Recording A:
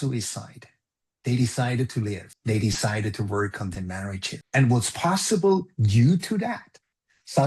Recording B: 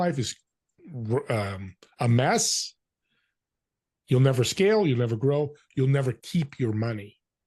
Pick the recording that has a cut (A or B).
A